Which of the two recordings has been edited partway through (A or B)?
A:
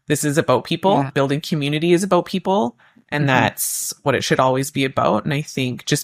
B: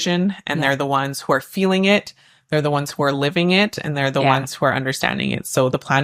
A